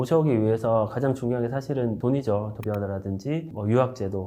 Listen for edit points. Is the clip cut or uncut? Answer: cut